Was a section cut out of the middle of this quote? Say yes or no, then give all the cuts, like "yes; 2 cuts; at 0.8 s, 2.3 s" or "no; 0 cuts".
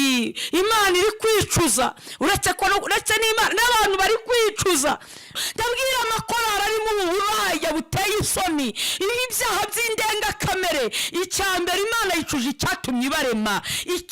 yes; 1 cut; at 5.3 s